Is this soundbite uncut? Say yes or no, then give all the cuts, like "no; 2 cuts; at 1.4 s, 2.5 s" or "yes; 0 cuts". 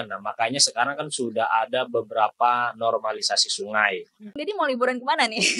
no; 1 cut; at 4.4 s